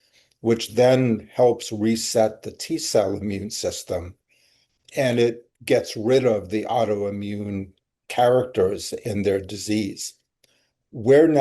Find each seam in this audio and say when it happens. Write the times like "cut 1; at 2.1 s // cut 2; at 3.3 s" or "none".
cut 1; at 9.0 s